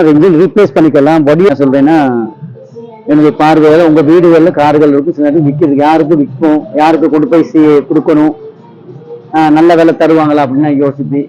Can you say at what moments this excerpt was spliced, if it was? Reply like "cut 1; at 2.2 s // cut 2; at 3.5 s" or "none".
cut 1; at 1.5 s